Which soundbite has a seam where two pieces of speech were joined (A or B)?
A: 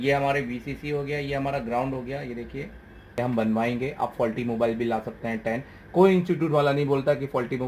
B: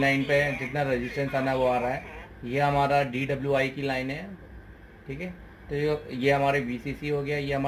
A